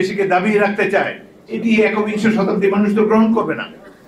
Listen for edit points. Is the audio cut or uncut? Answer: uncut